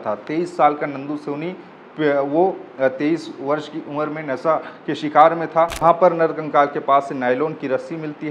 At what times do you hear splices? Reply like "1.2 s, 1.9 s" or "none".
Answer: 5.8 s